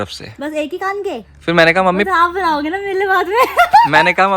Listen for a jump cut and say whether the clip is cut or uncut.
cut